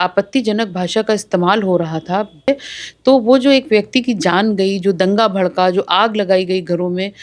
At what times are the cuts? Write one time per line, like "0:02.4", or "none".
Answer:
0:02.5